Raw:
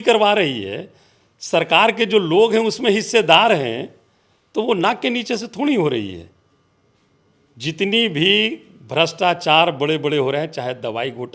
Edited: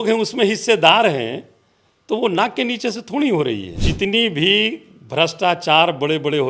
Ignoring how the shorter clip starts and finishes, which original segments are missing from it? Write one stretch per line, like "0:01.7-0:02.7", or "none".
0:06.2-0:07.6